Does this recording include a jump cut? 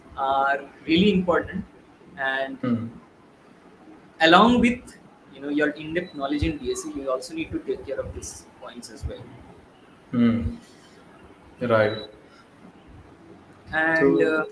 no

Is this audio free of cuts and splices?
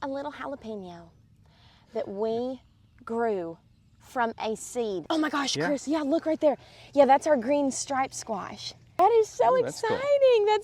no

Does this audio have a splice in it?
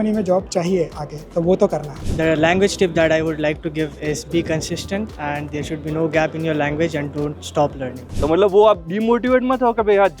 yes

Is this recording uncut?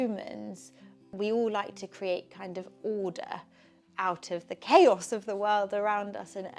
no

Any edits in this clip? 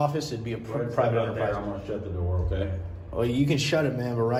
no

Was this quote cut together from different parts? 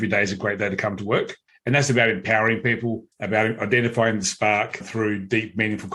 yes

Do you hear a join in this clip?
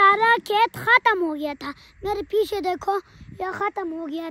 no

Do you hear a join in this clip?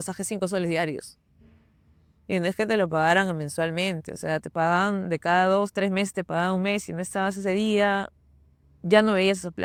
no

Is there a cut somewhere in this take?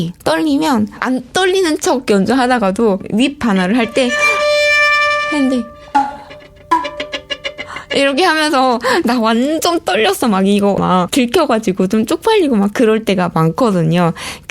yes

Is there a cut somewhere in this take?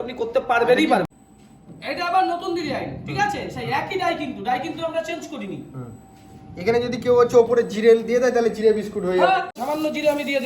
yes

